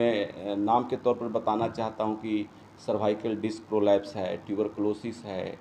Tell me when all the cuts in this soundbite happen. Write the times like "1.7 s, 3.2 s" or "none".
none